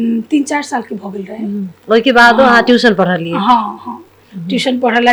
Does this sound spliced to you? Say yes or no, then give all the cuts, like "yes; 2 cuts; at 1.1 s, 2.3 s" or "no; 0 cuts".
no; 0 cuts